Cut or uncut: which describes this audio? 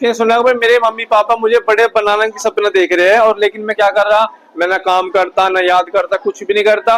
uncut